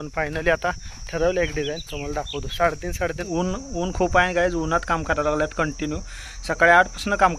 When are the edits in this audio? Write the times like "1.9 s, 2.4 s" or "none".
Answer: 3.2 s

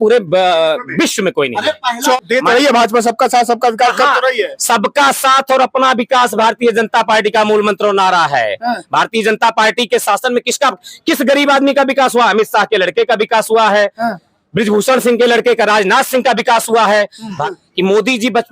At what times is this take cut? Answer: 2.2 s, 17.4 s

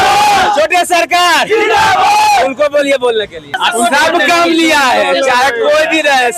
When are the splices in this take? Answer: 3.5 s

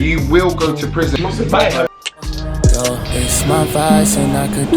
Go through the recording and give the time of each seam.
1.1 s, 2.4 s

